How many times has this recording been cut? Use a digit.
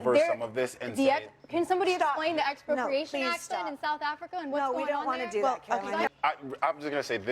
1